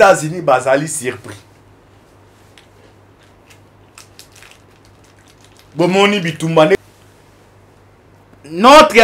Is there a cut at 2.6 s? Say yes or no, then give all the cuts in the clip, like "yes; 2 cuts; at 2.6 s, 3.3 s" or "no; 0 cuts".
no; 1 cut; at 6.8 s